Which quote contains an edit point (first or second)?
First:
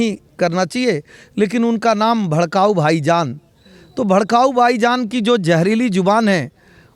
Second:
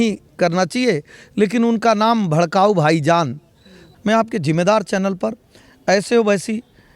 second